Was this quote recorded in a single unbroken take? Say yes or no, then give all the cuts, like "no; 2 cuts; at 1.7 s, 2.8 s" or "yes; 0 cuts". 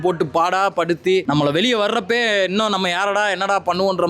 no; 1 cut; at 1.2 s